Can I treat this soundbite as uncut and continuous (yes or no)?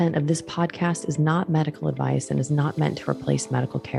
yes